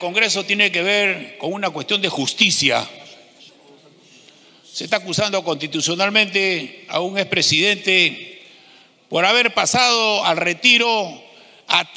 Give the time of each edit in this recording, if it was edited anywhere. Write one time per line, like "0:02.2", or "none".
none